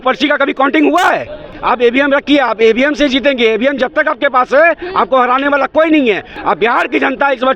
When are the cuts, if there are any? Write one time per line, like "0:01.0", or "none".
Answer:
0:01.5
0:06.3